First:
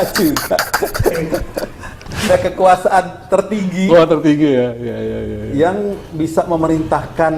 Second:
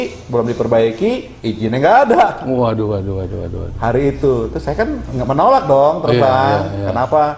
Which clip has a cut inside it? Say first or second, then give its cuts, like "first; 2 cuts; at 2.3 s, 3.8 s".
first; 1 cut; at 2.3 s